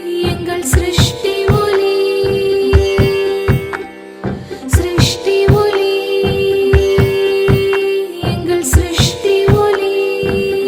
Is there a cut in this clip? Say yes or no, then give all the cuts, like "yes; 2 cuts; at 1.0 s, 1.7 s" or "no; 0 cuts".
no; 0 cuts